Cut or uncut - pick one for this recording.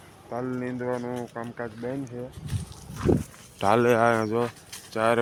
uncut